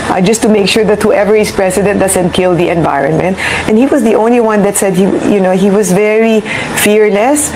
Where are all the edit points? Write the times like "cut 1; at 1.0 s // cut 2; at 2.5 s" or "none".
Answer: none